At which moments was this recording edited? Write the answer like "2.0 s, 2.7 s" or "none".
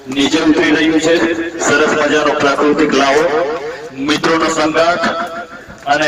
none